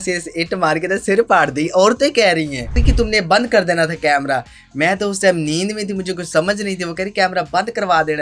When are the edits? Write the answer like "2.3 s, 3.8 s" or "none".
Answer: 2.8 s